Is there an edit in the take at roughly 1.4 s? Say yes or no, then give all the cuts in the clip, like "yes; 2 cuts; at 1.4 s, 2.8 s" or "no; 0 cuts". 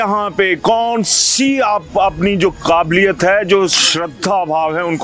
no; 0 cuts